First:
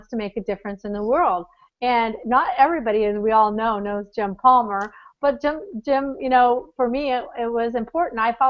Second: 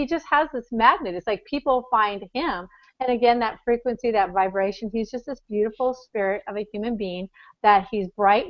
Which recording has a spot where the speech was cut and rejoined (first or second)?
second